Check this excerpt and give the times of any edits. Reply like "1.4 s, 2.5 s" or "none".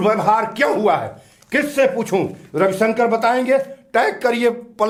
none